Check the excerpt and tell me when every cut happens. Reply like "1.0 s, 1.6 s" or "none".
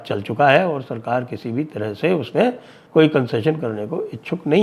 2.7 s